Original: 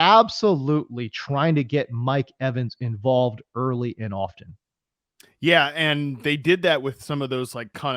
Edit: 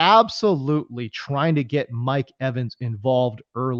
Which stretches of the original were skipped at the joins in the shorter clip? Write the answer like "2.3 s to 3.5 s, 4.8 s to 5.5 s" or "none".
none